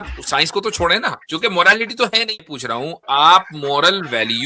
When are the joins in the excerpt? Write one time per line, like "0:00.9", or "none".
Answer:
0:02.3